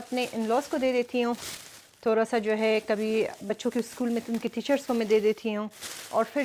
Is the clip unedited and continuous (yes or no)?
yes